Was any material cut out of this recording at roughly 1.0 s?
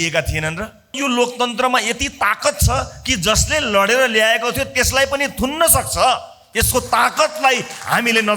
yes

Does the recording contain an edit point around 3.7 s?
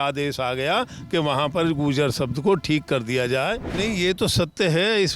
yes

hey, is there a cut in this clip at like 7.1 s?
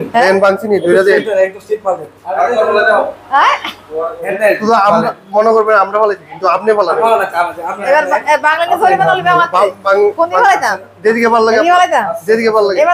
no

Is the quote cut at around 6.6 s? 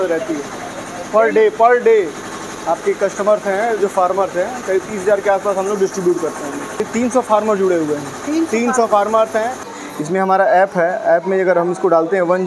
yes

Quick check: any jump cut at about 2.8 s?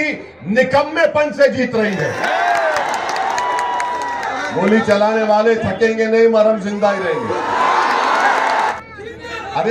yes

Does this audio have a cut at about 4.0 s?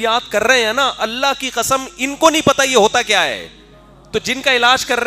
no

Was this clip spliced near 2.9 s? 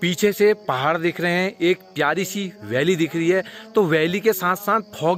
no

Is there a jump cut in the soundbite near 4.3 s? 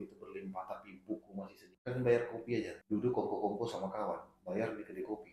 no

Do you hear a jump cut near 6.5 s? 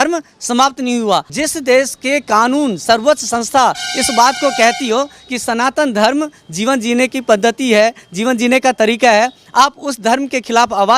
no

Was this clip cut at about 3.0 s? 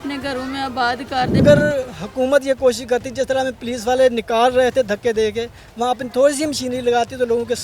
no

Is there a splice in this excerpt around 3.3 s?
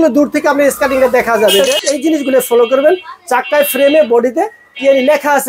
no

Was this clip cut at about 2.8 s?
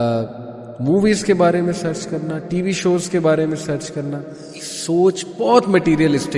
no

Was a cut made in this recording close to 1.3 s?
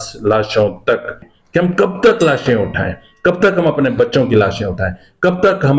yes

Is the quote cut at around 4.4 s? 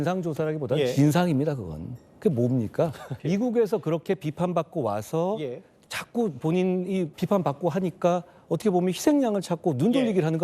no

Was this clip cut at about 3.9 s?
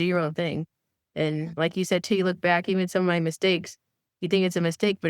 no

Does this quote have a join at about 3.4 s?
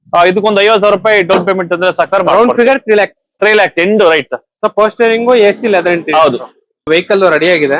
no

